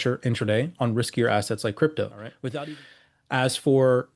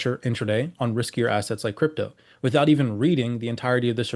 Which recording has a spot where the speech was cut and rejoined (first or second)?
first